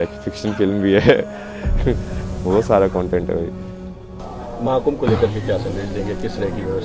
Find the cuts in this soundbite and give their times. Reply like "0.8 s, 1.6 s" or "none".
none